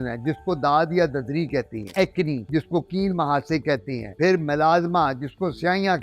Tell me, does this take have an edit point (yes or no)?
yes